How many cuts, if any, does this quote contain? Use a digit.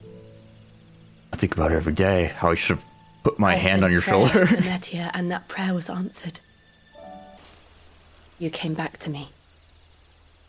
1